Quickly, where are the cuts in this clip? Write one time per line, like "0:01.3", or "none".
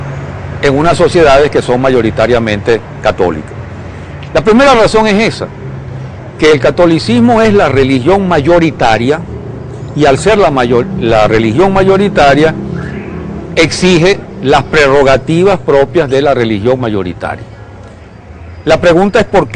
none

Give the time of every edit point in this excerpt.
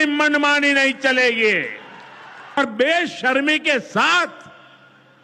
0:02.6

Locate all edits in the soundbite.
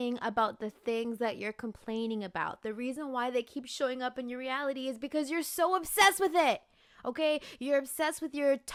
none

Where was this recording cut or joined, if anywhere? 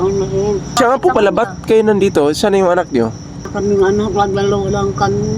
0:00.8
0:03.5

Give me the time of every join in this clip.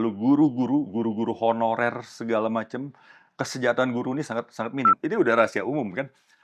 0:05.0

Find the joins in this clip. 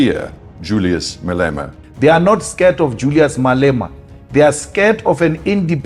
0:01.8

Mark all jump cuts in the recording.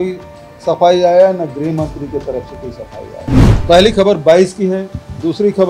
0:03.6

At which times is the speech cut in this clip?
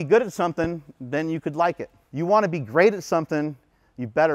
0:02.0

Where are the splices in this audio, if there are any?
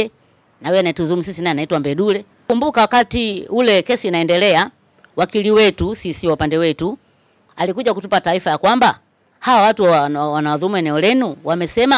0:02.3

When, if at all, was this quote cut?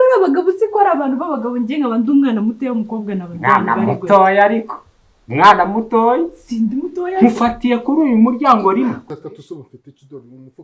0:09.1

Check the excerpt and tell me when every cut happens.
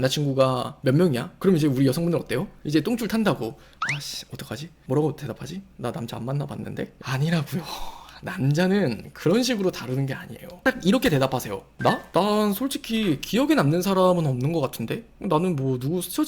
0:01.3
0:06.9
0:10.5

